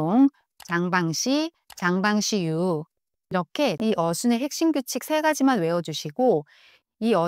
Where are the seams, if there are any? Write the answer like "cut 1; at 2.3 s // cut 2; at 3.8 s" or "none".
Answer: cut 1; at 3.8 s